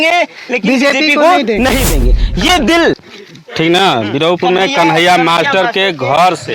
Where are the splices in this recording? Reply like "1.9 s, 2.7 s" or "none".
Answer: 3.0 s